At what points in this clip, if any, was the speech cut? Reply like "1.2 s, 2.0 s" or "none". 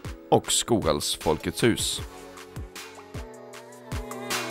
1.8 s